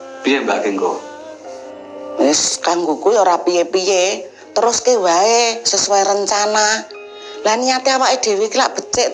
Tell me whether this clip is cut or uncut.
uncut